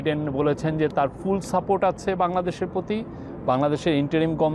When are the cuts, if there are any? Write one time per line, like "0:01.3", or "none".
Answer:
none